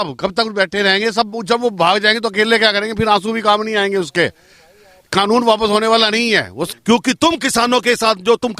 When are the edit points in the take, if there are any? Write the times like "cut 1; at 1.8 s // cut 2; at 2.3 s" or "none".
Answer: cut 1; at 6.6 s

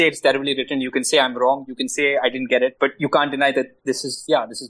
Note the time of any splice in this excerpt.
none

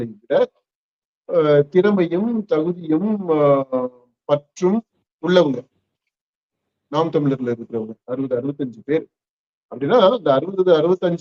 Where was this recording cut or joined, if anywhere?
none

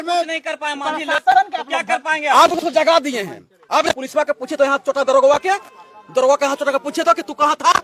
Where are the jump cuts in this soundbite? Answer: cut 1; at 4.0 s

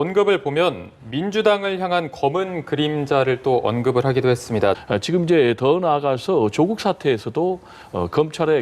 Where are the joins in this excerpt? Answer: cut 1; at 4.8 s

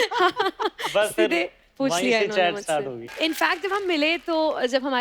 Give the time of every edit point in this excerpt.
cut 1; at 3.0 s

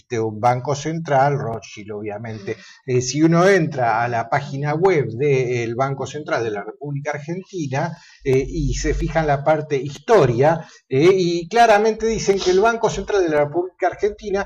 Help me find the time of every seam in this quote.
cut 1; at 0.9 s

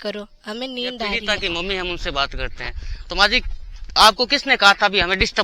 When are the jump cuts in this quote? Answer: cut 1; at 1.2 s

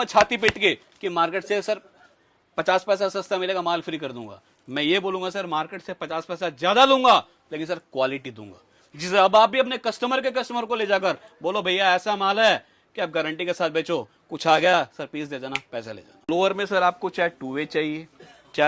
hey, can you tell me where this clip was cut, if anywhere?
cut 1; at 16.3 s

